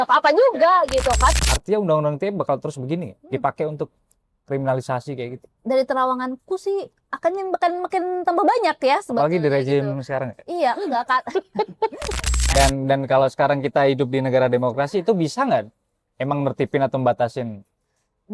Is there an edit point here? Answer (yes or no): yes